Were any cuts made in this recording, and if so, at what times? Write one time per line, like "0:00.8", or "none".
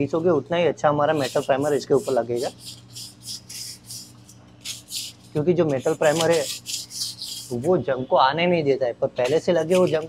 none